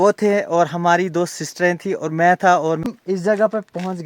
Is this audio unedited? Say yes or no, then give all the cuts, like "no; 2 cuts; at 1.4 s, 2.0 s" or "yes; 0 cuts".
no; 1 cut; at 2.9 s